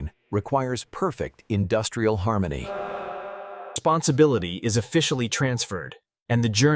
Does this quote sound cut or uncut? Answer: uncut